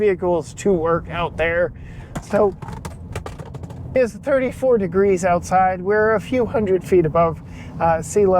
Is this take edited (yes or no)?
yes